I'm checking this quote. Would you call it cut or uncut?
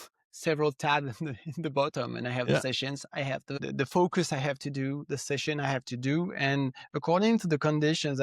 cut